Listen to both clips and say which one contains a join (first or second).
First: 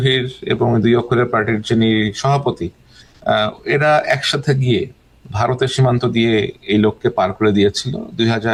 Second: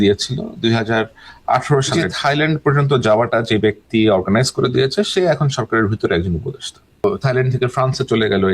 second